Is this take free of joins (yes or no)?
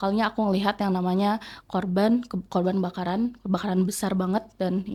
yes